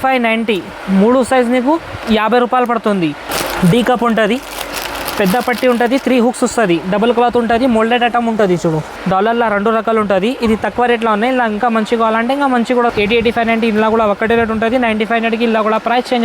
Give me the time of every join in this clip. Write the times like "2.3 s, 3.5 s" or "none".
3.3 s, 8.9 s, 12.9 s